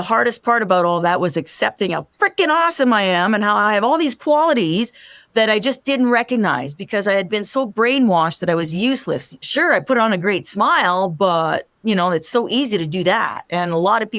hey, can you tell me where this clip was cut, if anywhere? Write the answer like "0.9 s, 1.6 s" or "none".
9.3 s